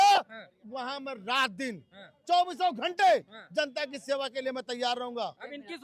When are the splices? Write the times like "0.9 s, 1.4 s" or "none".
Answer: none